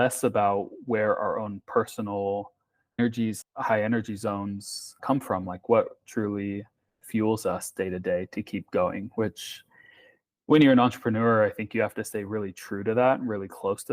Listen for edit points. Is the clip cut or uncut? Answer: cut